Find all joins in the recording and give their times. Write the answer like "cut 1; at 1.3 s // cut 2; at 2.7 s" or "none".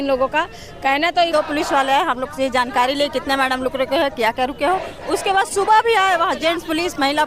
cut 1; at 1.3 s